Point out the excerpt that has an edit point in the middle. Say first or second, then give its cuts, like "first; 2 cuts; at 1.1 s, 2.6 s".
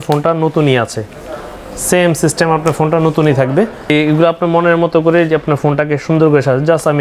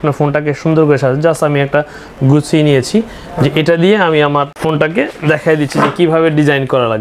first; 1 cut; at 3.9 s